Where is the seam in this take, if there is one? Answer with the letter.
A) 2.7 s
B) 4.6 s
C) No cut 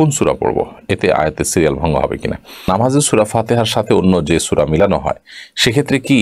A